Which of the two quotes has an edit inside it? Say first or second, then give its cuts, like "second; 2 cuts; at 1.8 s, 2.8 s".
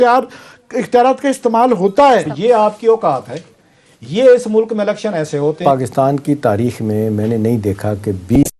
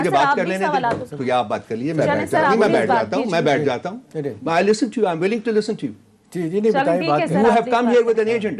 first; 2 cuts; at 2.3 s, 5.6 s